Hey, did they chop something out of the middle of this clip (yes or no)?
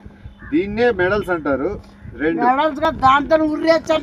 yes